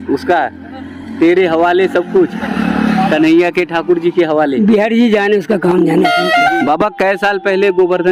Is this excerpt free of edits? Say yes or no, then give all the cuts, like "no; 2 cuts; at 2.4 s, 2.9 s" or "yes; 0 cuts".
yes; 0 cuts